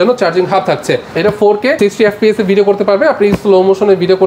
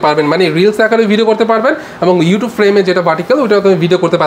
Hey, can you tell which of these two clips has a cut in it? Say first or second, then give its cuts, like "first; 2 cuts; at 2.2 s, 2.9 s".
first; 1 cut; at 1.1 s